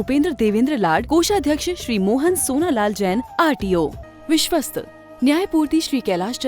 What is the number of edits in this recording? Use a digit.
1